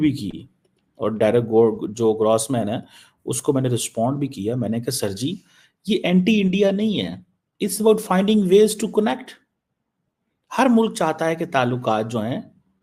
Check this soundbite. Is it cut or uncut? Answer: uncut